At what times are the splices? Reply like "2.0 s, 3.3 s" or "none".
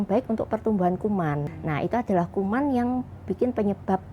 1.5 s